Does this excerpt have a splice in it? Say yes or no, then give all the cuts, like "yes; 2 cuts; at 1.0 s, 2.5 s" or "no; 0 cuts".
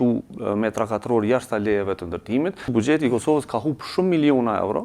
yes; 1 cut; at 2.6 s